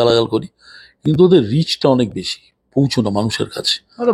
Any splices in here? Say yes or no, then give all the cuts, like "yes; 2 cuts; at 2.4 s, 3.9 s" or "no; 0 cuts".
no; 0 cuts